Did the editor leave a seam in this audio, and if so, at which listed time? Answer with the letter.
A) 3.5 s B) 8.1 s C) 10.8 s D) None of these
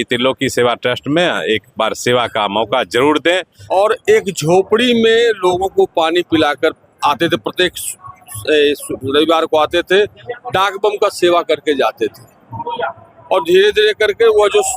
A